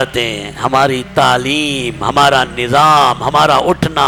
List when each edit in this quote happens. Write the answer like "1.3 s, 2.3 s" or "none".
none